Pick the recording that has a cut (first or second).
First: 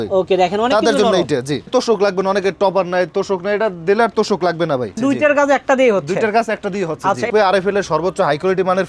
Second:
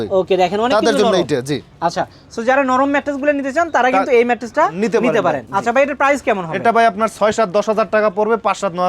first